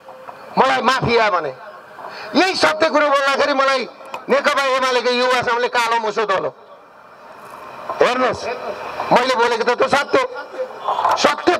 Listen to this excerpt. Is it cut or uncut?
uncut